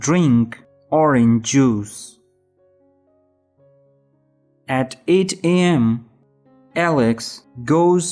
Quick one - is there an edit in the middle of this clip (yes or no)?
yes